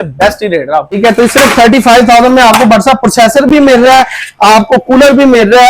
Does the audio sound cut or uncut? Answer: cut